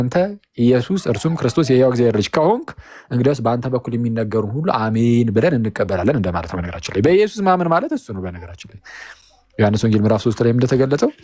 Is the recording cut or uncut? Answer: uncut